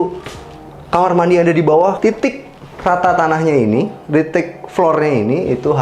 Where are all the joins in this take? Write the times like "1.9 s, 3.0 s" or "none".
2.0 s